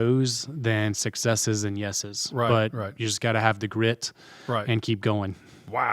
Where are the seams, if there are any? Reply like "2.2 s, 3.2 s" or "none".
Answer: none